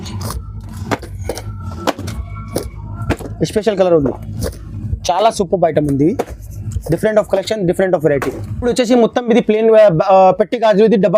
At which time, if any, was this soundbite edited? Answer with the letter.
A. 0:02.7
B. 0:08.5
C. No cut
B